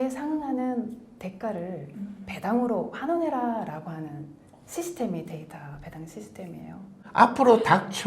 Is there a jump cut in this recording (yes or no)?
yes